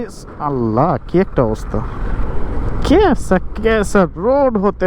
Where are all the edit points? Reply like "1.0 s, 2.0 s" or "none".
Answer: 2.2 s